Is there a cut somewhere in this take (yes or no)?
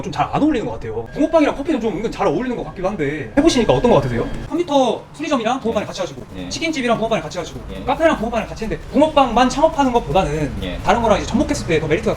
yes